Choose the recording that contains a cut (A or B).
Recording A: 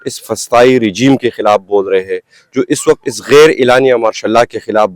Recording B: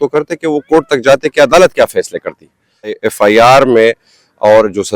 B